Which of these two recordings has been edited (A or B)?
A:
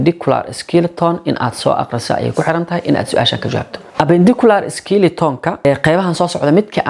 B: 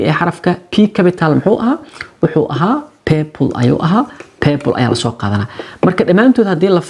A